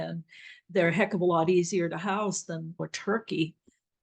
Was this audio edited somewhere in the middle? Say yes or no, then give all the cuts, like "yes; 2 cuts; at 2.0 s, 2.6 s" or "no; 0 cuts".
yes; 1 cut; at 2.8 s